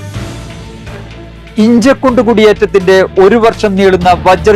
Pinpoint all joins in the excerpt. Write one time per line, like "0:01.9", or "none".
0:01.0